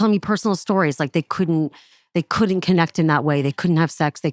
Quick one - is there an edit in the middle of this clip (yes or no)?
no